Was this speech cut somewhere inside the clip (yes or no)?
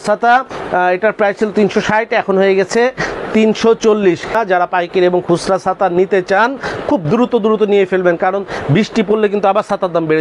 yes